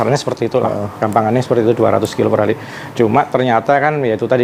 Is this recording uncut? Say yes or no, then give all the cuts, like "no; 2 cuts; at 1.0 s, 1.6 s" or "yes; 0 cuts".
yes; 0 cuts